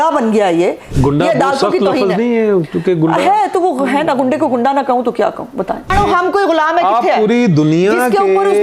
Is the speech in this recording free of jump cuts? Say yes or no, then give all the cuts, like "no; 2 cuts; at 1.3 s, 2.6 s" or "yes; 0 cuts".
no; 2 cuts; at 0.9 s, 5.9 s